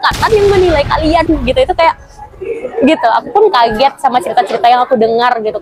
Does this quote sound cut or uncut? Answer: uncut